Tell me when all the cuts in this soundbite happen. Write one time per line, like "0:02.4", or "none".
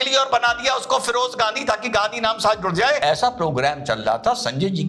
0:03.0